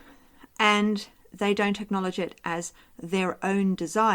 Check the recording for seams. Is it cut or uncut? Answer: uncut